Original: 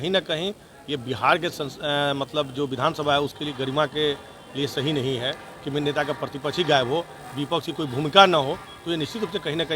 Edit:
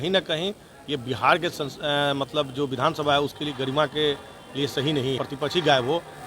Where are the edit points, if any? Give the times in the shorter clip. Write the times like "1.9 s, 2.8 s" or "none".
5.2 s